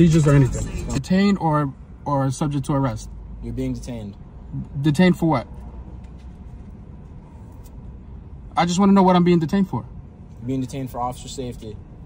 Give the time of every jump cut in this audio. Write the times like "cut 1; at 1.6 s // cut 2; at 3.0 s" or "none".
cut 1; at 1.0 s